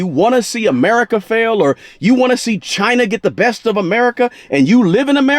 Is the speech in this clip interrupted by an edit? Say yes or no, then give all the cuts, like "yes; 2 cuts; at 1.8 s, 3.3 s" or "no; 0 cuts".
no; 0 cuts